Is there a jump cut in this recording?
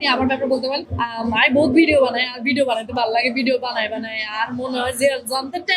yes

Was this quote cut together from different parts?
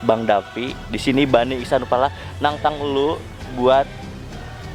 no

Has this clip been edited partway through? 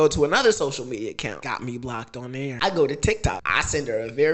yes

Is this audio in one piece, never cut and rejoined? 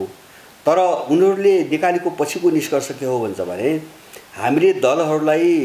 yes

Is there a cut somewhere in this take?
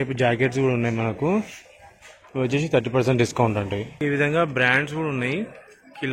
yes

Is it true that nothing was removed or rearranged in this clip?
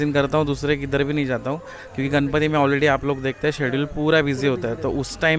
yes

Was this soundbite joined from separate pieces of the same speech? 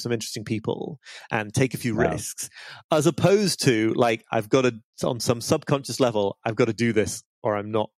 no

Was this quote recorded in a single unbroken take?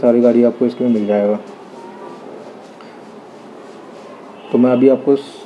yes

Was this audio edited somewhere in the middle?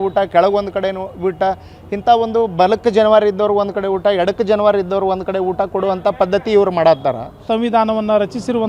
yes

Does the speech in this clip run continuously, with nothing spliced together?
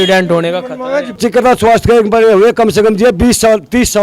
no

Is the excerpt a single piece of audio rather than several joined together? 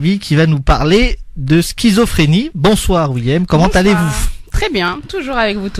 no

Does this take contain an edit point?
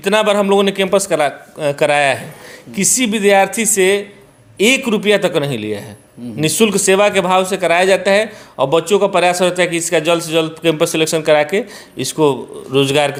no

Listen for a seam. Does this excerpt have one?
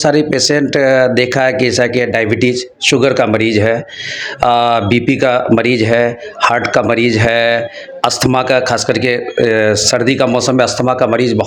no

